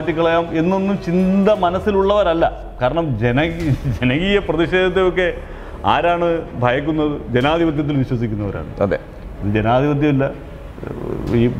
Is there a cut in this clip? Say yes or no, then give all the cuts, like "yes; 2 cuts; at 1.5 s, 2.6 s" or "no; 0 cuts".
no; 0 cuts